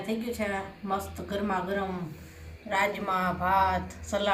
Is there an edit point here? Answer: no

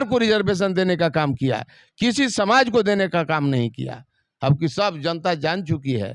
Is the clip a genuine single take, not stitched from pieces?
yes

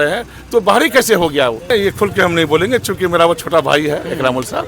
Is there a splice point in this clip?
yes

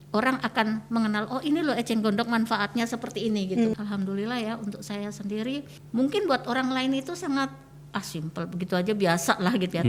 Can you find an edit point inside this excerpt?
yes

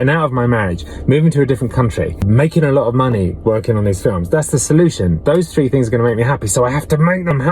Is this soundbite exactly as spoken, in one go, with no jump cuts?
no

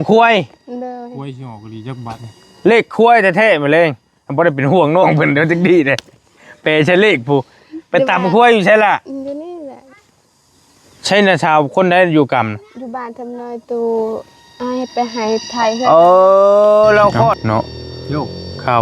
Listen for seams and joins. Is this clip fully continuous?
no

